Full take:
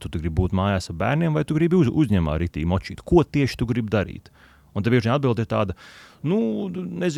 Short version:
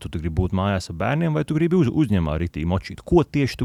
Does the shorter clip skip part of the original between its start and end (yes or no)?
no